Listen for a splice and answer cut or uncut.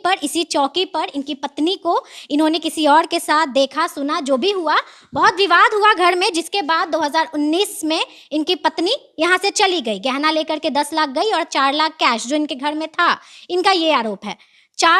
uncut